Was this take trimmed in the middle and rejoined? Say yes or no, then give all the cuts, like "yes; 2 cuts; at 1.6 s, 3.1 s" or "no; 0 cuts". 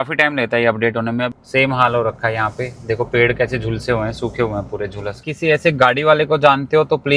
yes; 2 cuts; at 1.3 s, 5.3 s